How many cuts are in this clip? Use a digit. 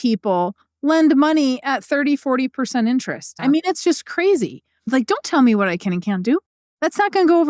3